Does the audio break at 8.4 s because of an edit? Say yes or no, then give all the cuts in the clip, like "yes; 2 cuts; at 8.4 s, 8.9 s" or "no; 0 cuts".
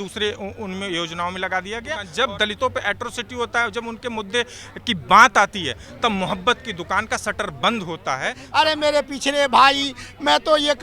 yes; 2 cuts; at 2.0 s, 8.4 s